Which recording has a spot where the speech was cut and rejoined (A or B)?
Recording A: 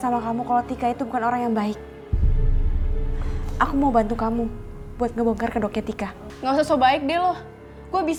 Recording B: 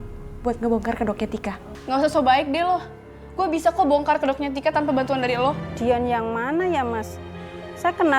B